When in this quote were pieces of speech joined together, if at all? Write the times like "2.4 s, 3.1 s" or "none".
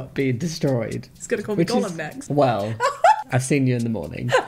none